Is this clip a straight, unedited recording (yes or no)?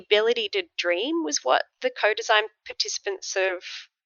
no